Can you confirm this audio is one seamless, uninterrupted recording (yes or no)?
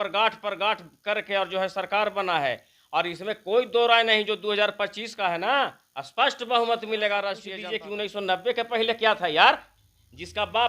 no